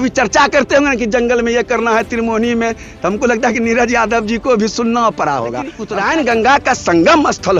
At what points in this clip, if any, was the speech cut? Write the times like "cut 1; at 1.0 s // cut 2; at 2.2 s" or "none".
cut 1; at 5.8 s